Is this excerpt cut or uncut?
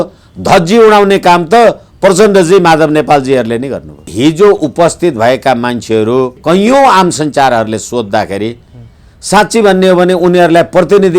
cut